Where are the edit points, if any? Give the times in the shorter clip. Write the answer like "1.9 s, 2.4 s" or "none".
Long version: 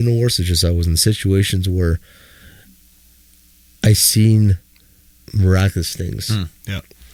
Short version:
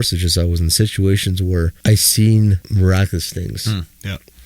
1.7 s, 2.6 s